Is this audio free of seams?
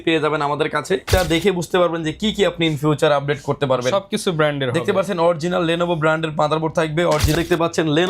no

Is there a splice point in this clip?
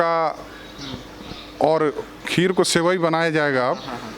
yes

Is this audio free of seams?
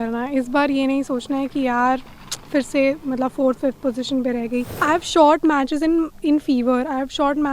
no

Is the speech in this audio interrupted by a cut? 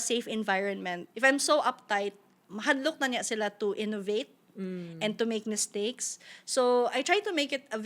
yes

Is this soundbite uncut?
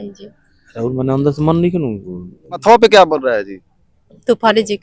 no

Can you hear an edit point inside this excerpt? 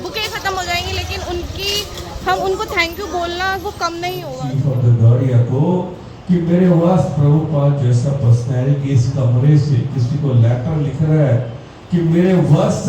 yes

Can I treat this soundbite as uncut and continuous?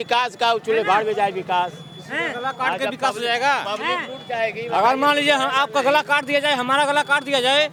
yes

